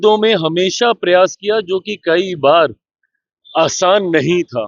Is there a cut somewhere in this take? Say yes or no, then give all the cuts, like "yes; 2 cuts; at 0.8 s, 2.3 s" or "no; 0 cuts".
no; 0 cuts